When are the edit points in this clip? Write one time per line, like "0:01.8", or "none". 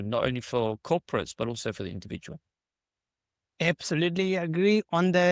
none